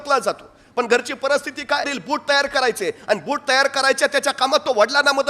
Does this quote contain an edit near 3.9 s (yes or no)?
no